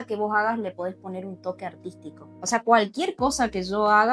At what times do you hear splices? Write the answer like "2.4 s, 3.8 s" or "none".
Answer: 2.3 s